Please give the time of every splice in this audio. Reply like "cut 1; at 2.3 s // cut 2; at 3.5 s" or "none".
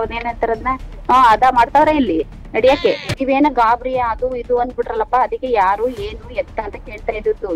cut 1; at 3.1 s